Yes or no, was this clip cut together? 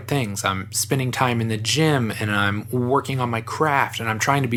no